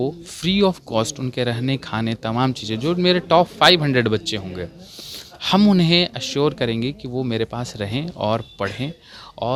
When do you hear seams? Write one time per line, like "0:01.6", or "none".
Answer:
none